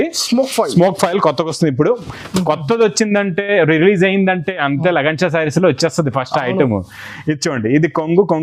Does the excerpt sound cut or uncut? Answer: uncut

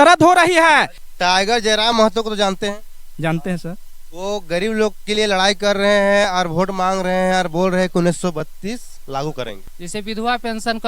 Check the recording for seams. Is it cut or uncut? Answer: cut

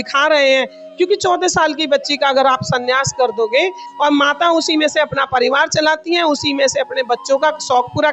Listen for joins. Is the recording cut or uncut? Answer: cut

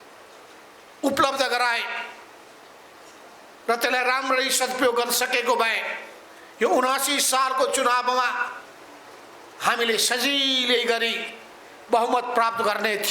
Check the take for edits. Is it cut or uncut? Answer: uncut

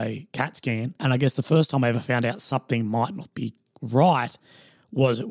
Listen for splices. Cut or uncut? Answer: cut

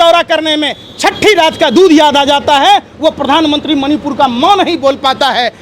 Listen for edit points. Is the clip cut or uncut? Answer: uncut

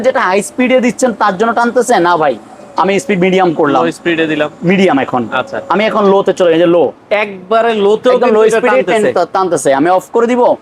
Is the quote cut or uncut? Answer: uncut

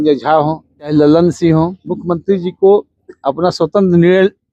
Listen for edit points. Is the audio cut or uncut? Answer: cut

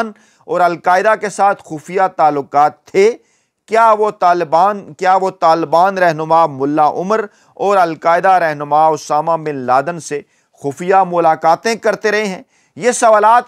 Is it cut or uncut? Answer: uncut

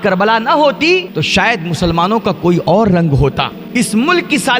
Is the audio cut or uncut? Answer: cut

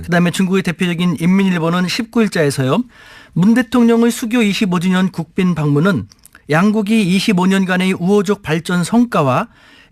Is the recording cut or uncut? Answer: uncut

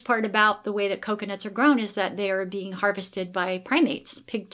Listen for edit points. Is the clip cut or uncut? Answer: uncut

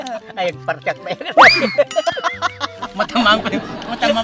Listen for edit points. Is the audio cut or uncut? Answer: uncut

